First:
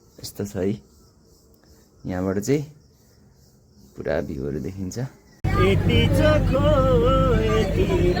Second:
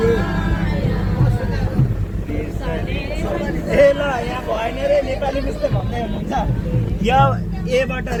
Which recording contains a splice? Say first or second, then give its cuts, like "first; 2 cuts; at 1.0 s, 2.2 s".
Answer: first; 1 cut; at 5.4 s